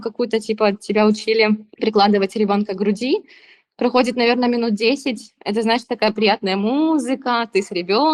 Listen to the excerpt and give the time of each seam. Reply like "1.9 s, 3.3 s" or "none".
none